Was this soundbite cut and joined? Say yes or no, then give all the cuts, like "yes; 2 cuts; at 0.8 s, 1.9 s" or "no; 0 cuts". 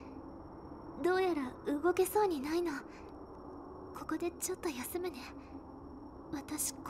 no; 0 cuts